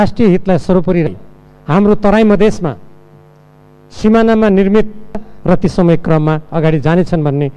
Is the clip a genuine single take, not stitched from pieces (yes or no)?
yes